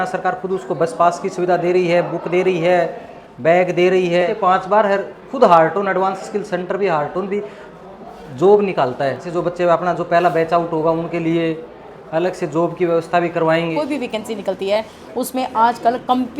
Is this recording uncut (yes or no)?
no